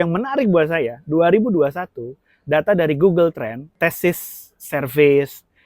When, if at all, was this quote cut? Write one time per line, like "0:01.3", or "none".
0:03.6